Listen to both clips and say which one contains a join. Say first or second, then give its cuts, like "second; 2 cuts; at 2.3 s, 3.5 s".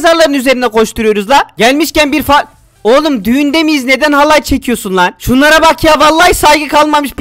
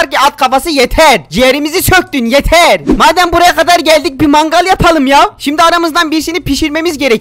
second; 1 cut; at 2.8 s